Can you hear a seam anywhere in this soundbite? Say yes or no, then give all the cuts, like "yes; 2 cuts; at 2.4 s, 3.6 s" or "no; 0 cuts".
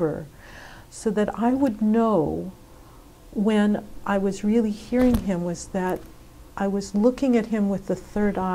no; 0 cuts